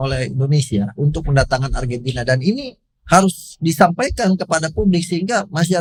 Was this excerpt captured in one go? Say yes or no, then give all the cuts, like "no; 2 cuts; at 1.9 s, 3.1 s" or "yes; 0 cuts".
yes; 0 cuts